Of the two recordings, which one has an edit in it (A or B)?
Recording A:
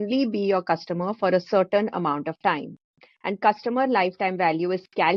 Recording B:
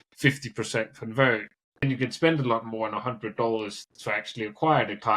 B